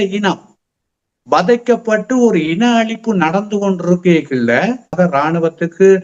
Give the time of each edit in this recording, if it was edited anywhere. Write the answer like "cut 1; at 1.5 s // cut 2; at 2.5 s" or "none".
cut 1; at 4.9 s